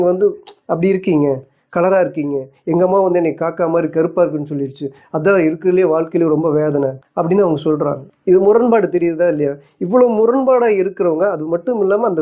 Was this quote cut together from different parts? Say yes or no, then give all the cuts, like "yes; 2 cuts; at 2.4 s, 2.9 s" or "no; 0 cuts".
yes; 2 cuts; at 7.0 s, 8.1 s